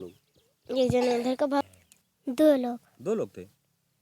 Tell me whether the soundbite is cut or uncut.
cut